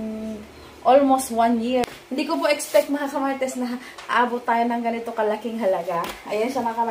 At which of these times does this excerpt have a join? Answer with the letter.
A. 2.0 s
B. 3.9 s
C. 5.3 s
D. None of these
A